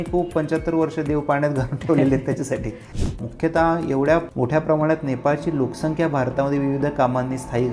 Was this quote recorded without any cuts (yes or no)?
no